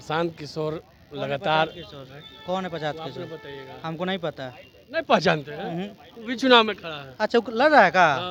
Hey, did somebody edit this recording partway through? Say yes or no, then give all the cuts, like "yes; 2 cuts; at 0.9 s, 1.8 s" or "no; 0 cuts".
no; 0 cuts